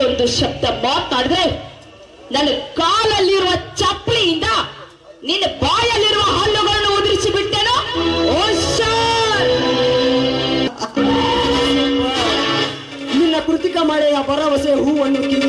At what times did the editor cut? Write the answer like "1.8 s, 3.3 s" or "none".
10.7 s